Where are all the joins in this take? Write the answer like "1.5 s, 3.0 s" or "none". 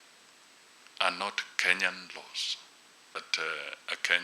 3.2 s